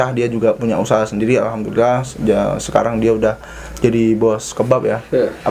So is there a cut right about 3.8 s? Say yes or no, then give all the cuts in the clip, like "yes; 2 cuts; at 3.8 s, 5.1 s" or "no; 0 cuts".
no; 0 cuts